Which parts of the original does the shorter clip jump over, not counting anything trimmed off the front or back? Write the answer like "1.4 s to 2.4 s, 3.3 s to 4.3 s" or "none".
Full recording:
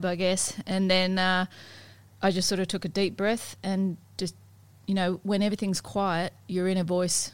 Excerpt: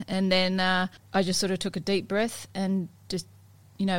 1.6 s to 2.1 s